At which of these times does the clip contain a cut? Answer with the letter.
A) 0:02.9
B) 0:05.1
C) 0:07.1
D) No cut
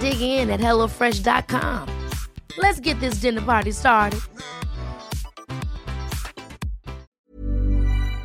C